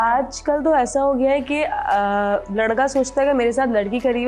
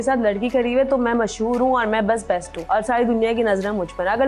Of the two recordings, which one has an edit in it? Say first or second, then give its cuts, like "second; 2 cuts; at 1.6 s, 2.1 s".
second; 1 cut; at 2.5 s